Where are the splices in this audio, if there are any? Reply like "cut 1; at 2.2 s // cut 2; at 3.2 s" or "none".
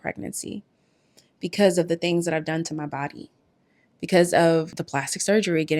cut 1; at 4.7 s